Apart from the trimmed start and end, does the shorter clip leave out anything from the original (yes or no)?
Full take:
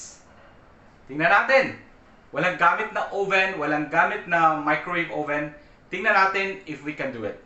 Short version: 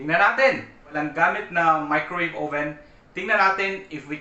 yes